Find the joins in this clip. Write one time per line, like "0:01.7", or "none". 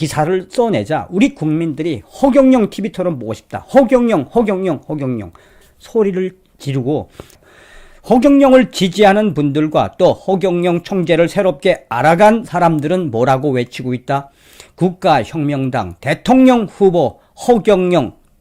0:07.4